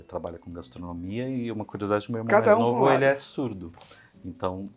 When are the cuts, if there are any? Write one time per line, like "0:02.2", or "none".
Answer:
none

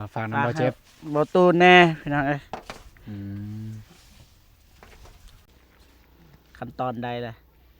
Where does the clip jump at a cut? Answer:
0:05.6

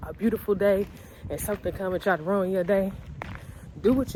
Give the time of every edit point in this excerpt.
none

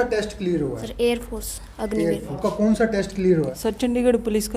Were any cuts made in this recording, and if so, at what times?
0:00.8
0:02.3
0:03.5

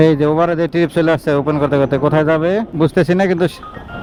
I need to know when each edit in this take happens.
none

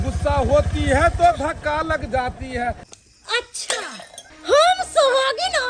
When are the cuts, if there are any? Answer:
0:02.9

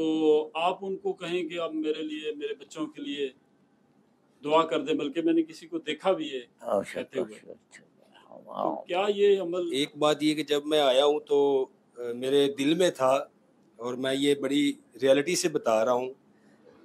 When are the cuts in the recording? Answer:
0:09.7

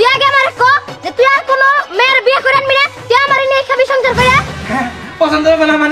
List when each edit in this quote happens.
0:04.5

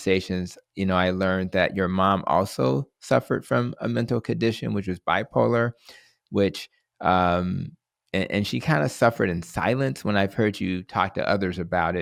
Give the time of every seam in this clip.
none

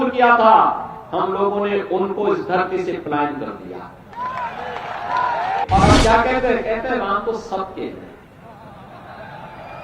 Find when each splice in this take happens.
0:05.6

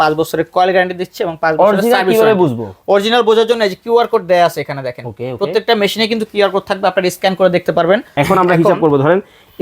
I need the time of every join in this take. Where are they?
0:08.1

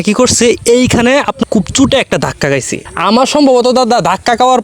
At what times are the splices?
0:01.4
0:02.8

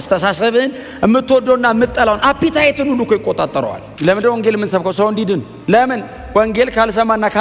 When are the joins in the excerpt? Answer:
0:03.8
0:05.5

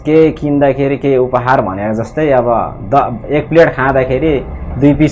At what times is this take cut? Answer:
none

